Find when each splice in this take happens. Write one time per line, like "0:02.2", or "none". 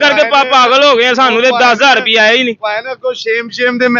none